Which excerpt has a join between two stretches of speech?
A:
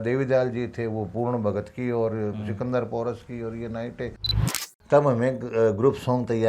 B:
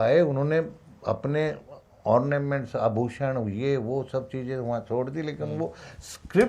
A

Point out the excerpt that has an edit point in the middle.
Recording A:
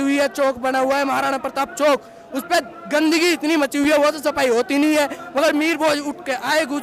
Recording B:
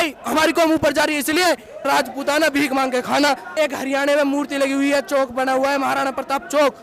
B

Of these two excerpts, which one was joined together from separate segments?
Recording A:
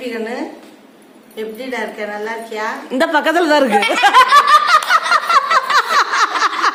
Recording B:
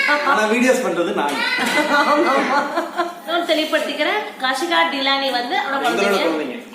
B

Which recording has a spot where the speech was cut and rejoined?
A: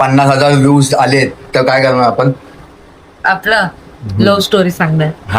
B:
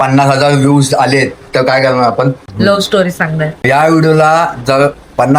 B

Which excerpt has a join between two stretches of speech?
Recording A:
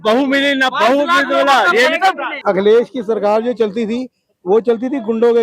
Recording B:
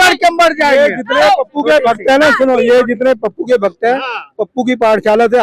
A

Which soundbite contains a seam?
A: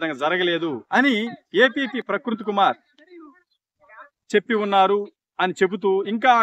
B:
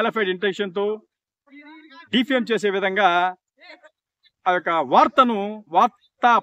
A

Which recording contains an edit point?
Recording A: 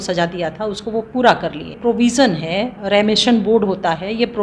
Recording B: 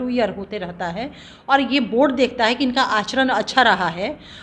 A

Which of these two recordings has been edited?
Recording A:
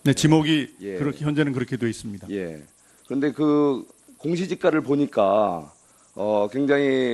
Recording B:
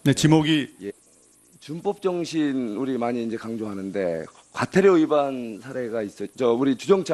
A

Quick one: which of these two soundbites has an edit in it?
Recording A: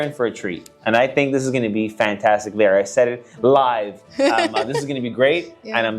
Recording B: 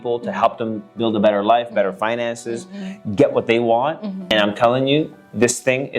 B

